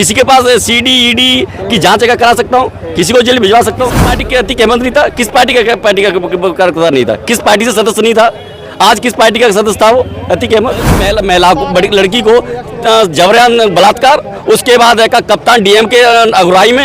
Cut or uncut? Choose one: cut